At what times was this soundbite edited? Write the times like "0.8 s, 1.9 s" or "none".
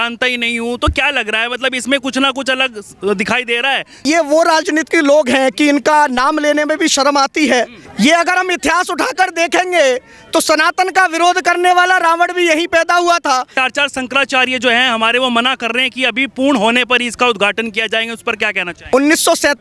4.0 s, 7.8 s, 13.5 s, 18.7 s